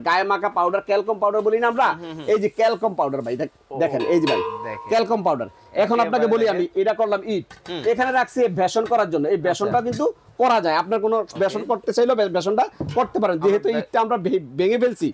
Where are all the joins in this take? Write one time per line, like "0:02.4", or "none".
none

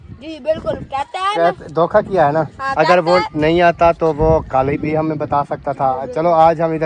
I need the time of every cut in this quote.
none

